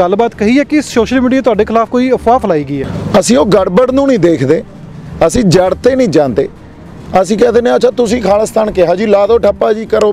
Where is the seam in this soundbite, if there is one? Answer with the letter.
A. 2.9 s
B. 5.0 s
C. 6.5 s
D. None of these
A